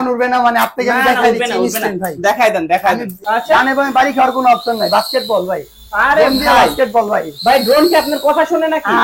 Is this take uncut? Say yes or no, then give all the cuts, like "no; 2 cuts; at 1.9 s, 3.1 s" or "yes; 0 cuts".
no; 1 cut; at 3.1 s